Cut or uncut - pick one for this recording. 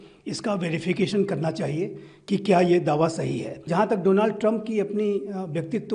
cut